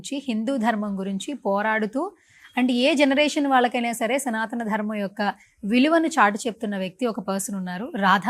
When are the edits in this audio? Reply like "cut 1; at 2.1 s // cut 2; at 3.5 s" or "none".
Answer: none